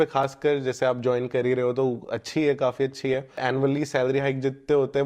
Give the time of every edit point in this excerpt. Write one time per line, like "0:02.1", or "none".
0:03.4